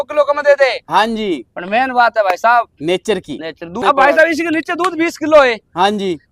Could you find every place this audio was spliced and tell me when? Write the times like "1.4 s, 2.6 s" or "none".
3.8 s